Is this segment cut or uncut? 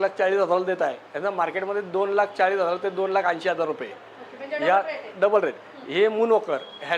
uncut